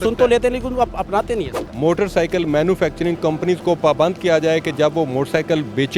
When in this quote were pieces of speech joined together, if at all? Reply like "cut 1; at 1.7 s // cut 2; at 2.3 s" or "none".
cut 1; at 1.6 s